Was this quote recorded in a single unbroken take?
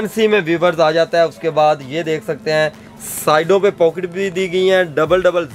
yes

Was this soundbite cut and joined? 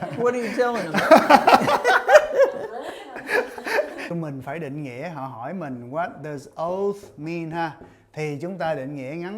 yes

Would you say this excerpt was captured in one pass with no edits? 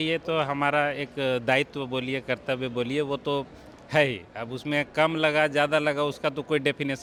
yes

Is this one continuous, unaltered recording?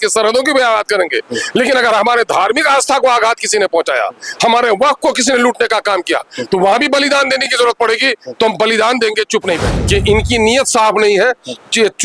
no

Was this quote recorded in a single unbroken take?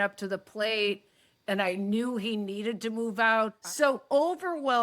no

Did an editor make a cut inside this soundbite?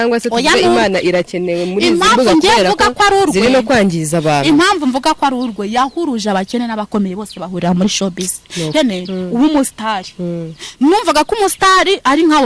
yes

